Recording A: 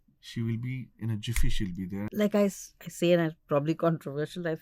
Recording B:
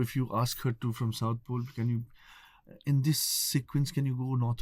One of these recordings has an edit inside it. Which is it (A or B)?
A